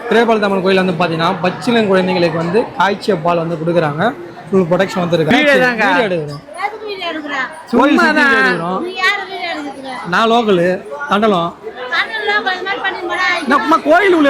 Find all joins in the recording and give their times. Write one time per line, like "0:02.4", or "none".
0:05.3